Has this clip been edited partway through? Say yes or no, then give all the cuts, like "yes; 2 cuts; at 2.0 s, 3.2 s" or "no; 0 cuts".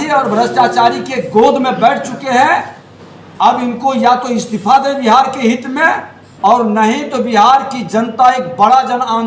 no; 0 cuts